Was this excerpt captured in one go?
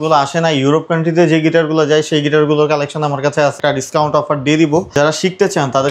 no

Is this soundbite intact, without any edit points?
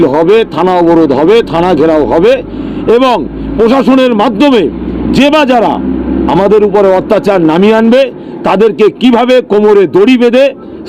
yes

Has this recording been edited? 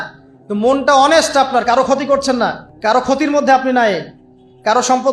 yes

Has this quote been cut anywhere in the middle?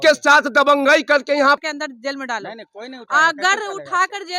yes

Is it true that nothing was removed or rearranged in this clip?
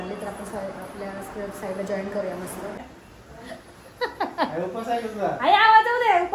no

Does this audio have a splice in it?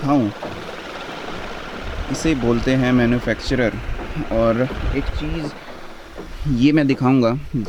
no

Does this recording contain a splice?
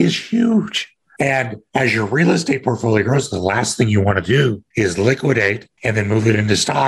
yes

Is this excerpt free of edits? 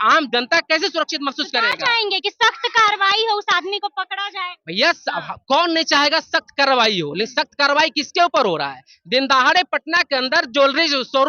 yes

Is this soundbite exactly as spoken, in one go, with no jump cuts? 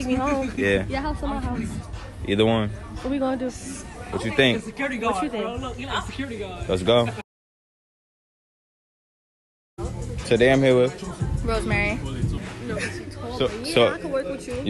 no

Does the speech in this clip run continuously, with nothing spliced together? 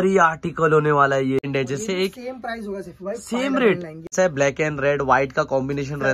no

